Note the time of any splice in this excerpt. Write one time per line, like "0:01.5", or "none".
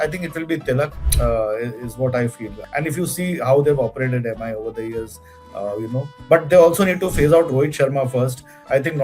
0:01.0
0:02.6